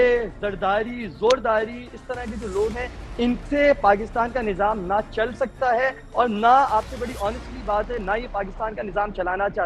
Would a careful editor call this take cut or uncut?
uncut